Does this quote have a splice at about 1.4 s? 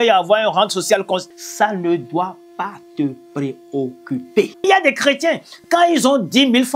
yes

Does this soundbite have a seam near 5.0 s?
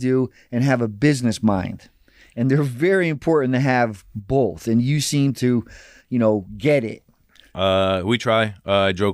no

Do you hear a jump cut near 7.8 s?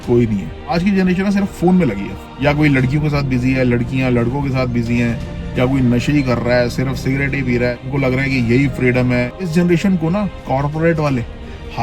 yes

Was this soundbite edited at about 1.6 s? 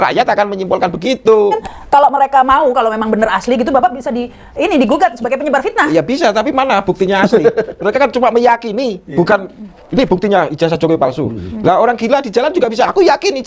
yes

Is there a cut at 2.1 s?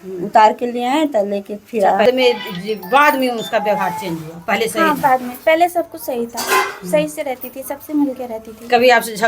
yes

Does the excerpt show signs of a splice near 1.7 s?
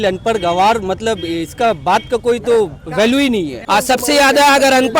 no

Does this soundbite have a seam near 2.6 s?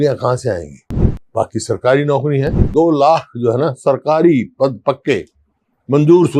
yes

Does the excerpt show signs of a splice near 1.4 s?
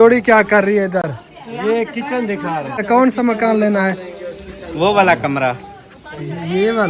no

